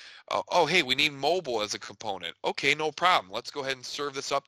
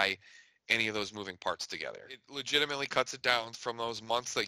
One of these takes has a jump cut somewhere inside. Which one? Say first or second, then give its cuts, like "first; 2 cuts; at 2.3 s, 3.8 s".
second; 1 cut; at 2.3 s